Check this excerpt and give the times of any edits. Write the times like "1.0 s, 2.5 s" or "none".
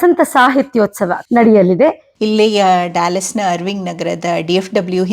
2.1 s